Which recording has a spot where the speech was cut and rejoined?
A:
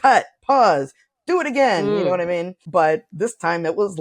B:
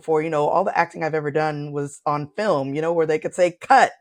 A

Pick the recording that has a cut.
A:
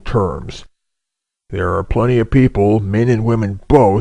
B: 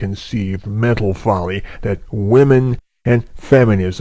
B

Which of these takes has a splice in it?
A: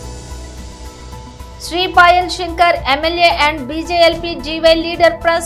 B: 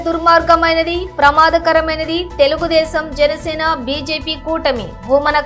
A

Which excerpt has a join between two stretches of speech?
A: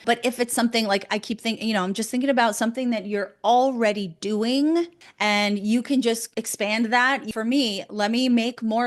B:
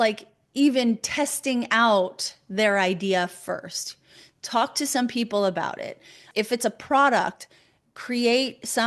A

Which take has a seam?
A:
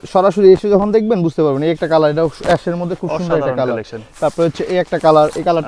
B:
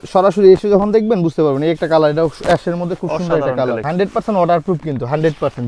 B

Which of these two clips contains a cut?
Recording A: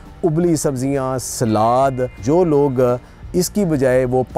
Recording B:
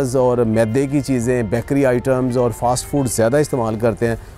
A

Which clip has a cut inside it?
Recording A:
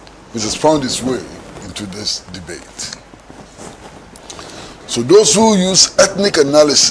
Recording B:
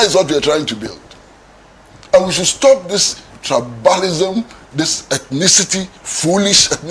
A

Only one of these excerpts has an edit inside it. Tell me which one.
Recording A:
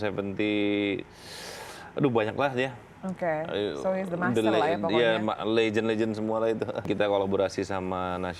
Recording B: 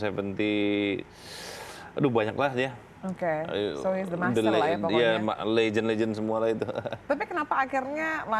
A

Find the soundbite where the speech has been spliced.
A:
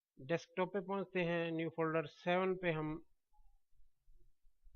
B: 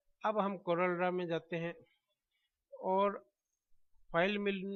A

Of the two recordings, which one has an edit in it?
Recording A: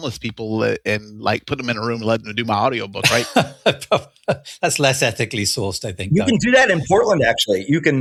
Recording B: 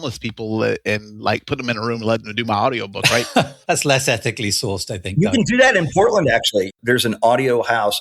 B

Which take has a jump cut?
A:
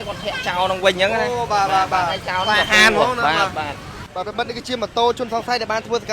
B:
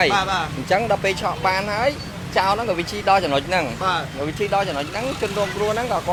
A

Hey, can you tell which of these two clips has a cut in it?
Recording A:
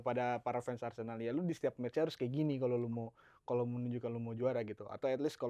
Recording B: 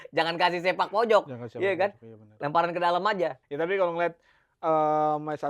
B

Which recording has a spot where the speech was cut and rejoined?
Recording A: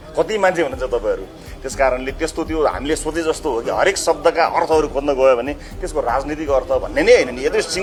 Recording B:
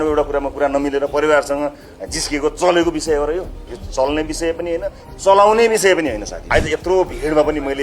B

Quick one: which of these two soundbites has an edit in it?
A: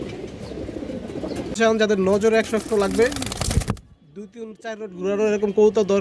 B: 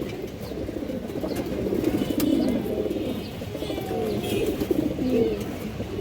A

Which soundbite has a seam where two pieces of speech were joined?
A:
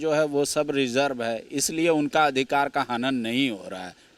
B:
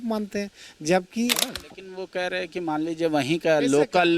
B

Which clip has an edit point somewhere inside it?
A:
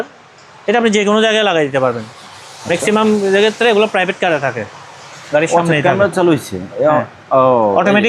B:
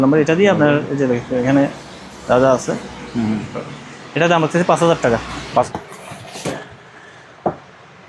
B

